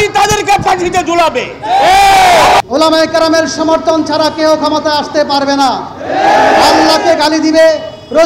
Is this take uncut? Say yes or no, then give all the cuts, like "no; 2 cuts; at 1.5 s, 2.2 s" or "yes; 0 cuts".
no; 1 cut; at 2.6 s